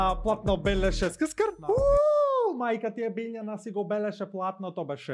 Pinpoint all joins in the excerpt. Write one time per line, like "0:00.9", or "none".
none

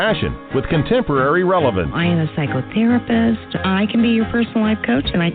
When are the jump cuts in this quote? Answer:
0:02.1

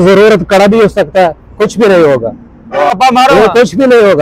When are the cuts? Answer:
0:02.9

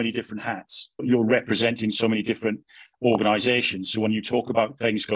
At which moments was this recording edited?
0:01.0

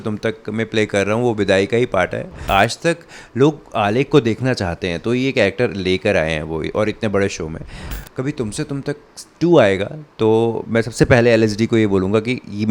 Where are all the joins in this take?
0:02.4
0:07.9

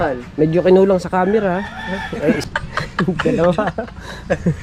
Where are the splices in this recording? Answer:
0:02.4

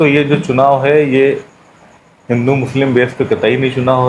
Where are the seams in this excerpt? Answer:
none

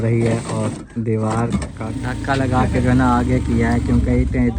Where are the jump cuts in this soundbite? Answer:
0:01.8

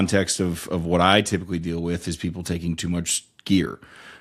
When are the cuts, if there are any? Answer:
none

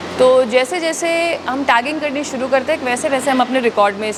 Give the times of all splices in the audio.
none

